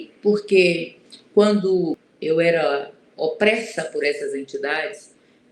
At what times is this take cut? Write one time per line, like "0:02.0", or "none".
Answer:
0:02.1